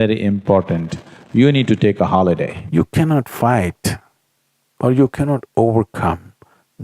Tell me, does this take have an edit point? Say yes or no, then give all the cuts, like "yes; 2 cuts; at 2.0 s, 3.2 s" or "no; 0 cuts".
yes; 1 cut; at 2.6 s